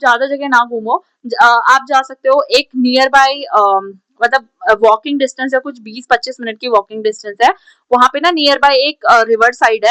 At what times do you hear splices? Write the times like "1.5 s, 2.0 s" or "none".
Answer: none